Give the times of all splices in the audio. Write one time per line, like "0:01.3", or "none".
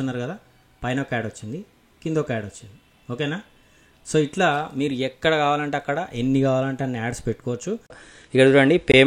0:08.0